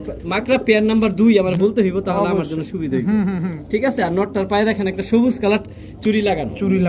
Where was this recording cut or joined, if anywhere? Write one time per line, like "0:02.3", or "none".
none